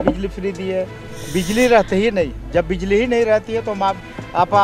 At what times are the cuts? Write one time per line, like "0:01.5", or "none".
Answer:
0:01.0